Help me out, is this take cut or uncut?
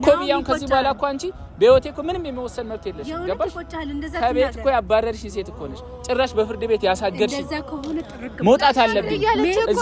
uncut